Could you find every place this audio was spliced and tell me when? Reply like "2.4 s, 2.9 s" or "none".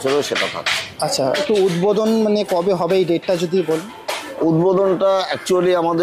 1.4 s